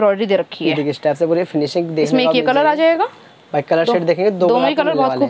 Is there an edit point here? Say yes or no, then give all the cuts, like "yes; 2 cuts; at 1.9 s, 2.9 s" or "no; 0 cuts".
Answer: no; 0 cuts